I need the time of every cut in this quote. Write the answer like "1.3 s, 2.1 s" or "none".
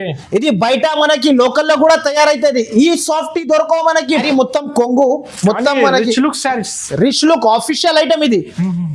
4.2 s